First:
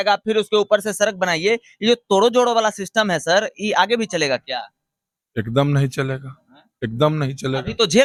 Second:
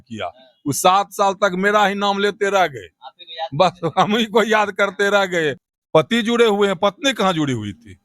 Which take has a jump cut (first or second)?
second